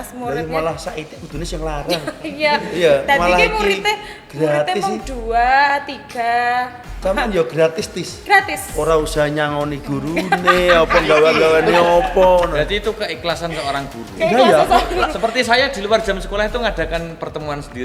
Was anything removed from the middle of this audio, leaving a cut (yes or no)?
yes